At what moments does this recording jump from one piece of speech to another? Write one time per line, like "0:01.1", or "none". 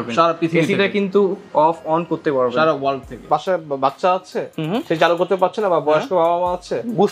0:03.3